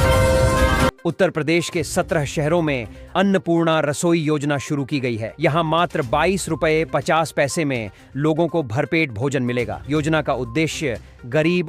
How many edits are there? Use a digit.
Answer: 1